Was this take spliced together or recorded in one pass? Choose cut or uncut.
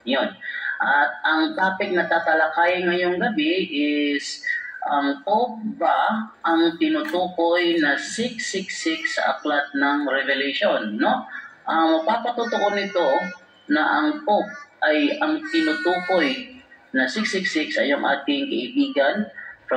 cut